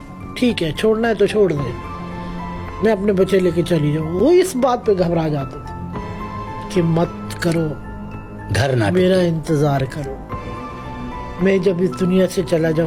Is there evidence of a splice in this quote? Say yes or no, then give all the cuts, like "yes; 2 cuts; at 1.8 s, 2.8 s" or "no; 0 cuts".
no; 0 cuts